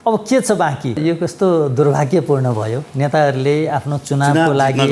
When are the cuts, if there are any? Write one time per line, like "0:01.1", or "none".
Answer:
0:01.0